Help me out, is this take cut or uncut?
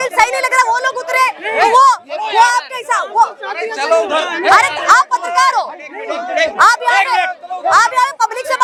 uncut